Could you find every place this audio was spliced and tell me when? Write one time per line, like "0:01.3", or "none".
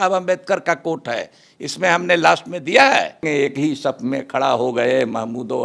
0:03.3